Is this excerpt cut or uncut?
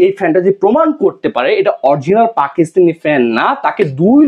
uncut